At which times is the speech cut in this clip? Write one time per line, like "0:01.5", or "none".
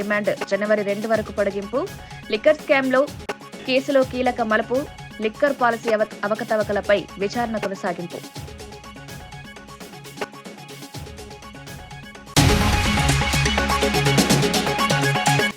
none